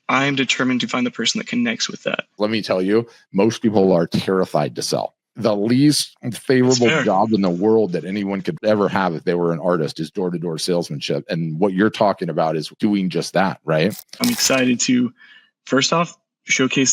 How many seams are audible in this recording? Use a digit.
4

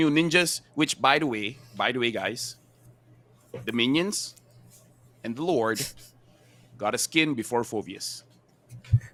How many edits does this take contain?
0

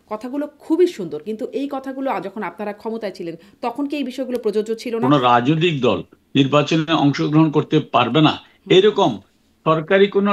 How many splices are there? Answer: 1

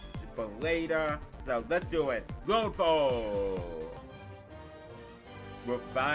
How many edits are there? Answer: 3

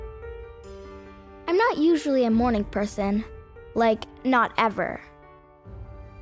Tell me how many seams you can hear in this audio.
1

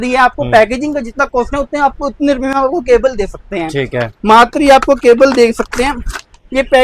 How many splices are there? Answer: 0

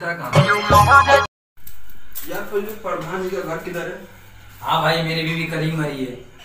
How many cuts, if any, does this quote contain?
1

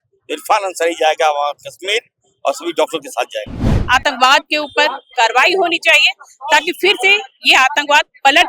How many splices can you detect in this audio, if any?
1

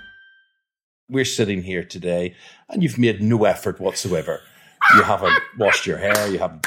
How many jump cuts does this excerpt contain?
1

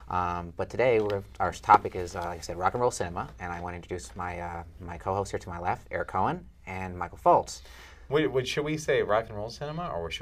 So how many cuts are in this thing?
1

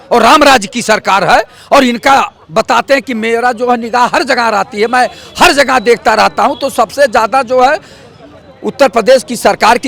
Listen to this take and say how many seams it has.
0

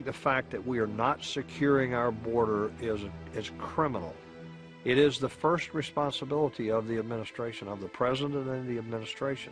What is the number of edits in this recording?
0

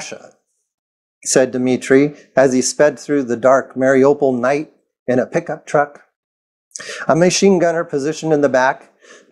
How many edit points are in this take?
0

